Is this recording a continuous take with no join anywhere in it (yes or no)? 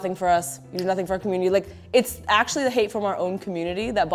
yes